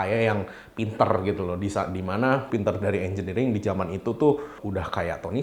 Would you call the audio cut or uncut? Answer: cut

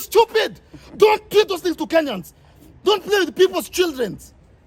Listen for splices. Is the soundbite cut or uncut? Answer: uncut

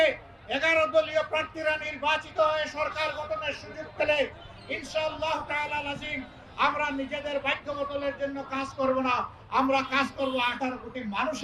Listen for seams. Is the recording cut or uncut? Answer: uncut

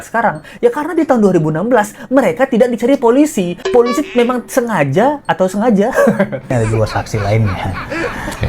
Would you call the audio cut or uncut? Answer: cut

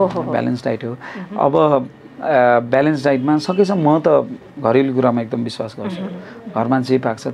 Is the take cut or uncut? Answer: uncut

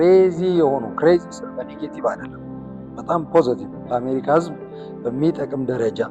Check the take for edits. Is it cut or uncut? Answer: uncut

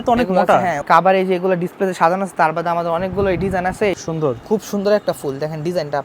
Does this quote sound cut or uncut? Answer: cut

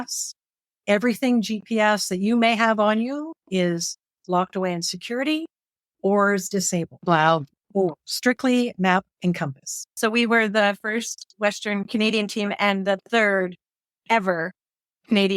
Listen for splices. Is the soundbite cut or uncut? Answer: cut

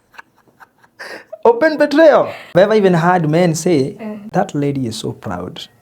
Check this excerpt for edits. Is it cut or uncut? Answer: cut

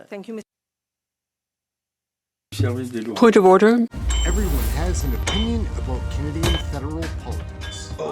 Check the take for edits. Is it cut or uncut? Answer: cut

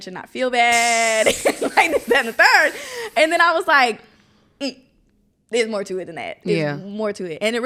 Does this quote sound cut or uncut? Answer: uncut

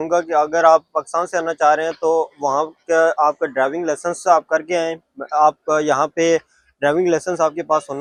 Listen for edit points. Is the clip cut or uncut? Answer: uncut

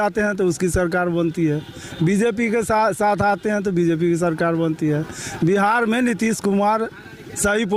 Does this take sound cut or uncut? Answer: uncut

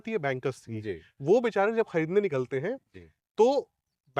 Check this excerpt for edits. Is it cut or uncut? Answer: uncut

